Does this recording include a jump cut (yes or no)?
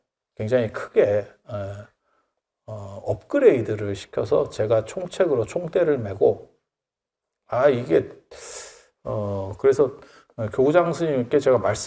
no